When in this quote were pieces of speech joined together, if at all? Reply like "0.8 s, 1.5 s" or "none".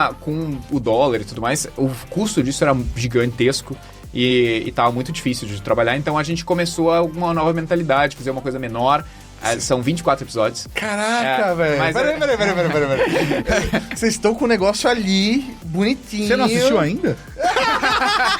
9.2 s